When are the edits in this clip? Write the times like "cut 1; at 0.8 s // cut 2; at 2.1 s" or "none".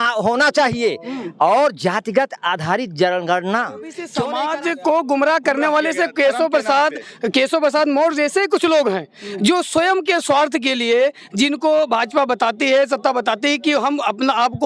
cut 1; at 4.1 s